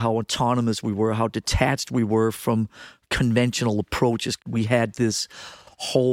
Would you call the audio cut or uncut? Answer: cut